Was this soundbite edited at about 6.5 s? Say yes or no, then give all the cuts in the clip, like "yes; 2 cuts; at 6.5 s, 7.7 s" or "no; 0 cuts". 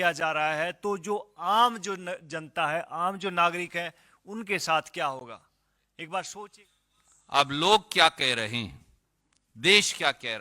yes; 1 cut; at 6.5 s